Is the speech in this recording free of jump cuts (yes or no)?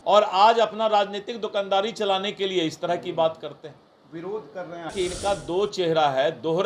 no